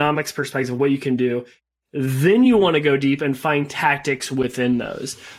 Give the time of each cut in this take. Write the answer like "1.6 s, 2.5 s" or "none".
1.5 s